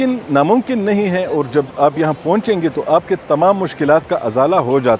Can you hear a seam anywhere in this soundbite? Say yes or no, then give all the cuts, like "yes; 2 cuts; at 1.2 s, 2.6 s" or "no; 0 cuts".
no; 0 cuts